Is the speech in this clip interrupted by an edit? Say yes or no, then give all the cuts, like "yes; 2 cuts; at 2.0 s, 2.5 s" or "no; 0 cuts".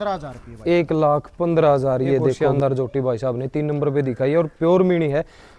yes; 1 cut; at 2.5 s